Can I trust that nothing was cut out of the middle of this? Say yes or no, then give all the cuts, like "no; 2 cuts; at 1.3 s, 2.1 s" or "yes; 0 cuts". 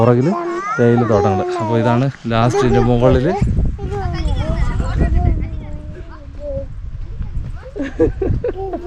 yes; 0 cuts